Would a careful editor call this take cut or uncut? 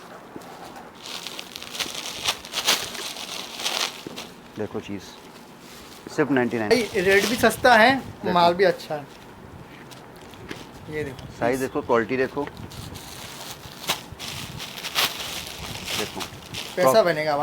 cut